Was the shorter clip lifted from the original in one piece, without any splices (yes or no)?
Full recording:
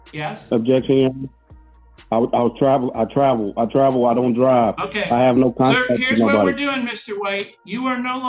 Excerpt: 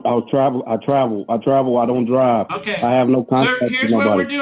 yes